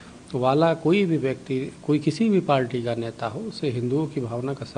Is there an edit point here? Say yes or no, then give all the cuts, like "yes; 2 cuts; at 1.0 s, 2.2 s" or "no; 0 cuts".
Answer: no; 0 cuts